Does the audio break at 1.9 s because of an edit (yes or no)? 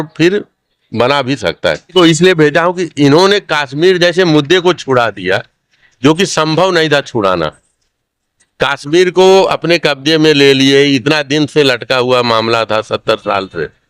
yes